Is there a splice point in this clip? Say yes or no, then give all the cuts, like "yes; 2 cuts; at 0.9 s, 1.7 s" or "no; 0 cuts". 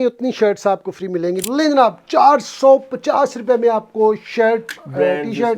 yes; 1 cut; at 1.4 s